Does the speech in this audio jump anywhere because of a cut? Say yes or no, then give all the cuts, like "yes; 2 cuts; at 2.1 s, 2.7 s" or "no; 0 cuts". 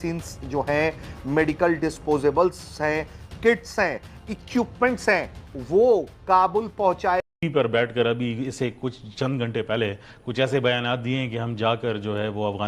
yes; 1 cut; at 7.3 s